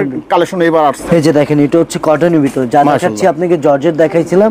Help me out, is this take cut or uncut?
cut